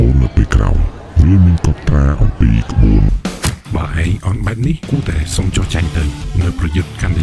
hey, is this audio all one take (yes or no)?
no